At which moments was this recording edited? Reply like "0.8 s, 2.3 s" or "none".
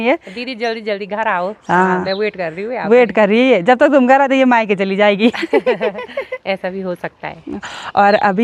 none